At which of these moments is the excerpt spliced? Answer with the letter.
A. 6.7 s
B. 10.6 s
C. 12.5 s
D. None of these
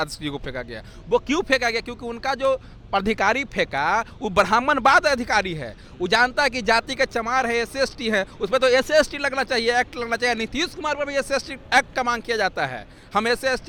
D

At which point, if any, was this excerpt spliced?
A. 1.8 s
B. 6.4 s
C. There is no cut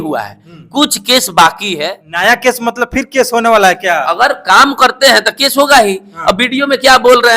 A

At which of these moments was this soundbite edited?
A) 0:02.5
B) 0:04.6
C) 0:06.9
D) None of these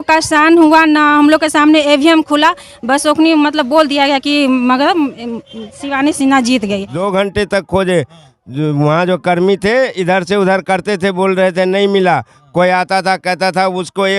C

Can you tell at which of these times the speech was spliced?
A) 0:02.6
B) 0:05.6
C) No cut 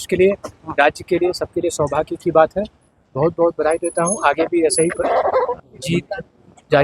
B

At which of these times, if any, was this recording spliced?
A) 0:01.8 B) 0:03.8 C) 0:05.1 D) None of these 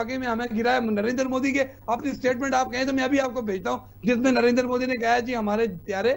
D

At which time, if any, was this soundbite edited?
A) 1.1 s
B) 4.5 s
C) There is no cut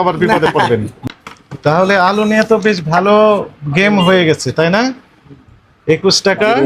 A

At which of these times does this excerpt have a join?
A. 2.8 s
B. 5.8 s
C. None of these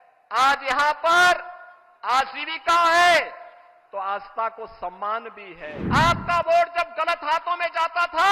B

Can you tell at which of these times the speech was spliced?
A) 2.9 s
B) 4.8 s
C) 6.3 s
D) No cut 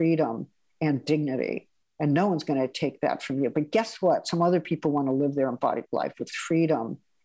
C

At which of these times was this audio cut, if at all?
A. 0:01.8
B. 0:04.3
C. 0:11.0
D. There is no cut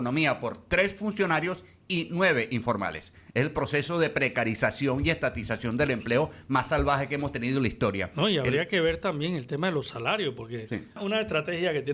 C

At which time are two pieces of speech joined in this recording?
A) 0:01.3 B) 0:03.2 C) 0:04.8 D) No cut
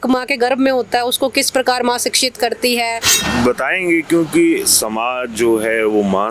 B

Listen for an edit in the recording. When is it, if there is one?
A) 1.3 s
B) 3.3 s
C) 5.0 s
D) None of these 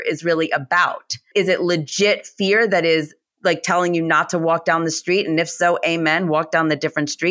A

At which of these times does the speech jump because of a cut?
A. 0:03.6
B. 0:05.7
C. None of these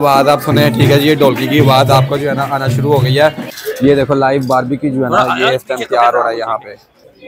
A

